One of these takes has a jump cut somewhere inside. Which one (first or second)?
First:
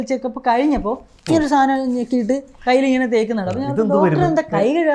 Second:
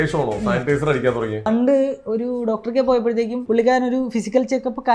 second